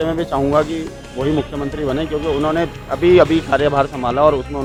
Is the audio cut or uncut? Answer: uncut